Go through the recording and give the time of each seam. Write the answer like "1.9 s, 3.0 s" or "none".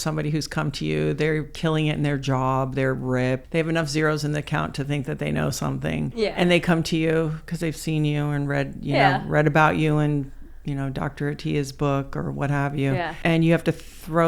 3.4 s, 6.1 s, 13.1 s